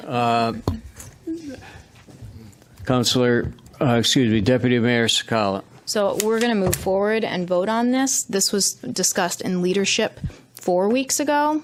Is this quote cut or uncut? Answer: uncut